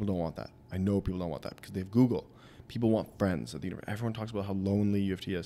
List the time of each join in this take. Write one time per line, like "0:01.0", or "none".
none